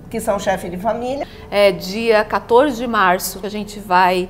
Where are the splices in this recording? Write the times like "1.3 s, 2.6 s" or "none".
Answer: 1.3 s, 3.4 s

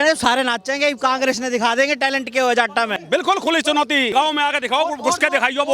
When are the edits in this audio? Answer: 3.0 s, 4.1 s

